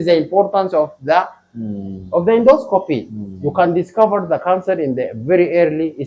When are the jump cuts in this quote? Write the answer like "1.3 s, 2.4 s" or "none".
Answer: none